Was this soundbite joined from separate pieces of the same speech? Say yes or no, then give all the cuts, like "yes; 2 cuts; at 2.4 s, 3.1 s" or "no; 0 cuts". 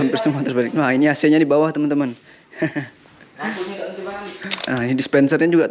yes; 1 cut; at 4.6 s